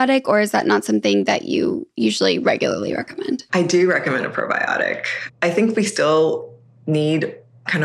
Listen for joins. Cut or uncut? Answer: cut